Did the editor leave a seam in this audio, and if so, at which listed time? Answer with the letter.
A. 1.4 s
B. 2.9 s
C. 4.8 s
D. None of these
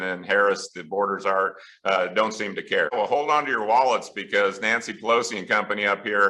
B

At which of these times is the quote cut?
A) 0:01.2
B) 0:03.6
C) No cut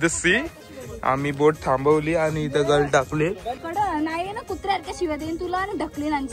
B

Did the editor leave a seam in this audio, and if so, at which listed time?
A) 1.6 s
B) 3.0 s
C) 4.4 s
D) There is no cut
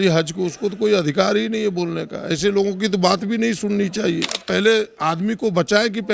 C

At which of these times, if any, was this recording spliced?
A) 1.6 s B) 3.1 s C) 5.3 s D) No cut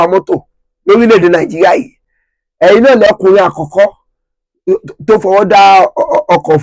B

